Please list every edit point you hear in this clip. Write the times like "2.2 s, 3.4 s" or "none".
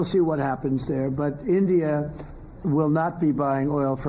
3.1 s